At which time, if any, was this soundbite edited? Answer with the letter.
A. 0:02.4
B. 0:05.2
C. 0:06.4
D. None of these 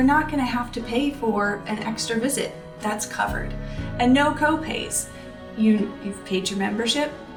D